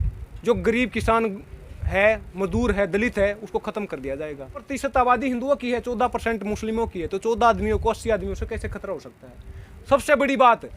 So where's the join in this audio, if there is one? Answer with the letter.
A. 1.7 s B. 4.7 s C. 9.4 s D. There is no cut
B